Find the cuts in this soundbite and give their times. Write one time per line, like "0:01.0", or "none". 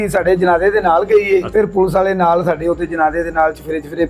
0:01.5